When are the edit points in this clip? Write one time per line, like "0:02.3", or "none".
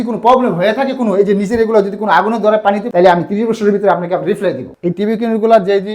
0:02.8
0:04.7